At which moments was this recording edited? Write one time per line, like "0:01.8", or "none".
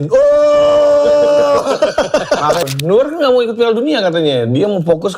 0:02.6